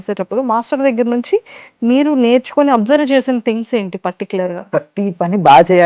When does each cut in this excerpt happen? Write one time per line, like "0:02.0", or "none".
0:04.6